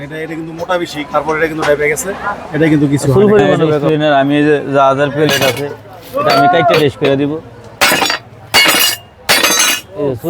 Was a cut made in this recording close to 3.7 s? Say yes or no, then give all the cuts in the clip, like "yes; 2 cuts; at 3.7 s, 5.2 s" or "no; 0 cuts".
yes; 1 cut; at 3.7 s